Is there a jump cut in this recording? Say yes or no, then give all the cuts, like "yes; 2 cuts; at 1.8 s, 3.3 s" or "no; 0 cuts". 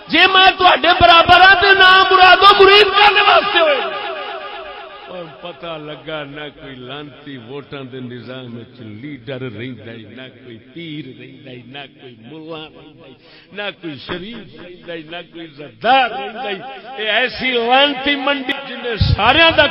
yes; 1 cut; at 18.5 s